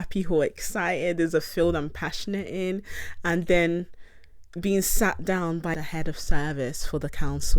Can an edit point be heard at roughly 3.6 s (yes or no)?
no